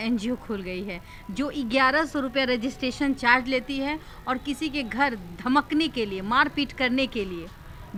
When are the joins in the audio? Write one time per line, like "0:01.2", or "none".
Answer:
none